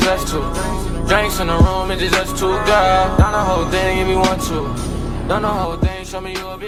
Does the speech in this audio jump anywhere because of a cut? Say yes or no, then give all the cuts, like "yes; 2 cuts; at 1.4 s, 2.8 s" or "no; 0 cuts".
no; 0 cuts